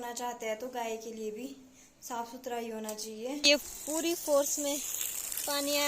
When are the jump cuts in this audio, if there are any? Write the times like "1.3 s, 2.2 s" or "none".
3.4 s